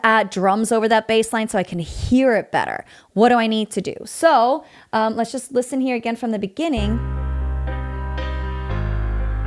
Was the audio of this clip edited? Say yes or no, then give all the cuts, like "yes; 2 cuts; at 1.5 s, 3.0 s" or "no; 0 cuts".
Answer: no; 0 cuts